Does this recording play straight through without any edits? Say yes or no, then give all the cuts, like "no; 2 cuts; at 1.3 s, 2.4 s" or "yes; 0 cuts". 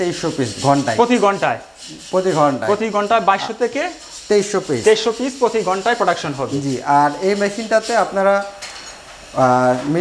yes; 0 cuts